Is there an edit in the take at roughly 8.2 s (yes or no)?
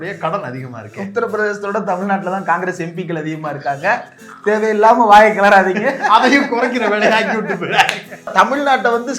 yes